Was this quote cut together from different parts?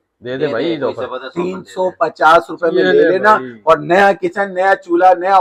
no; 0 cuts

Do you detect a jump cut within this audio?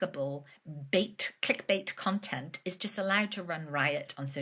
no; 0 cuts

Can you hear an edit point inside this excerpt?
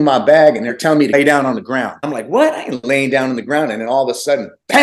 yes; 2 cuts; at 1.0 s, 2.0 s

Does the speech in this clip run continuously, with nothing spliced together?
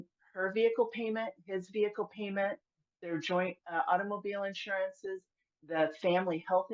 yes; 0 cuts

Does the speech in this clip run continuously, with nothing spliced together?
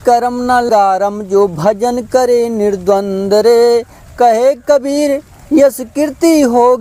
yes; 0 cuts

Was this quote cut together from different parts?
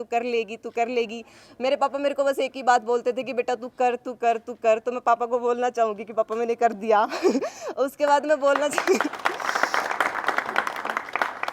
no; 0 cuts

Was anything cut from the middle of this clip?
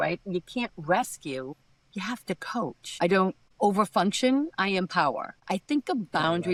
no; 0 cuts

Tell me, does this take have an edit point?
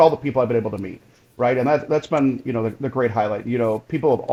no; 0 cuts

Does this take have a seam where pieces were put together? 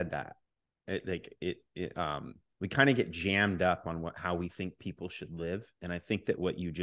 no; 0 cuts

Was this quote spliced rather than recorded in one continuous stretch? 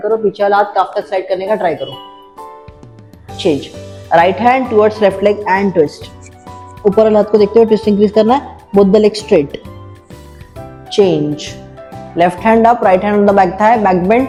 no; 0 cuts

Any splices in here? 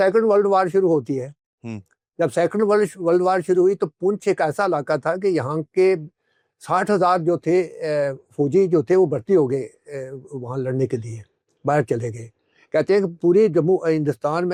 no; 0 cuts

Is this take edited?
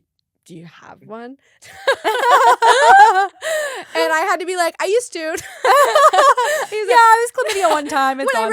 no; 0 cuts

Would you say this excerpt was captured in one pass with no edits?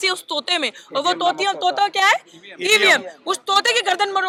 yes; 0 cuts

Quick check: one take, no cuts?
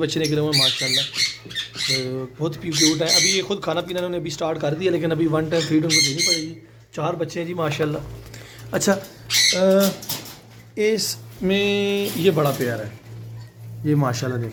yes; 0 cuts

